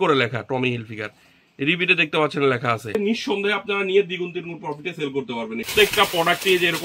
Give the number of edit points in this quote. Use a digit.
2